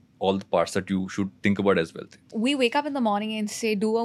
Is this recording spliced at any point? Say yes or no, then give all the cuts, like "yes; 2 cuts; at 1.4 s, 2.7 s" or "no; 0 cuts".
yes; 1 cut; at 2.2 s